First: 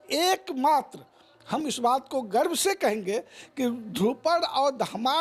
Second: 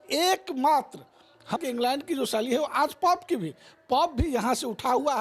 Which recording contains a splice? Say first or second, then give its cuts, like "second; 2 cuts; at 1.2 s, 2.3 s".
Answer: second; 1 cut; at 1.6 s